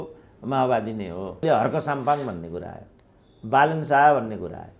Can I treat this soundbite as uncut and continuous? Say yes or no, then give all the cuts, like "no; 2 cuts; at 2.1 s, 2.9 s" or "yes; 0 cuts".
no; 1 cut; at 1.4 s